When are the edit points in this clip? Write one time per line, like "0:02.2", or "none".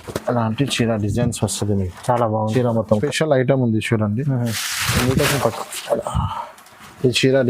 0:03.0